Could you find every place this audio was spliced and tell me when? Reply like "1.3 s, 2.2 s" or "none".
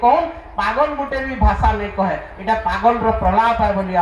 none